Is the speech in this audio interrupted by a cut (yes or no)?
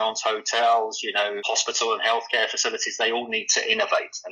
yes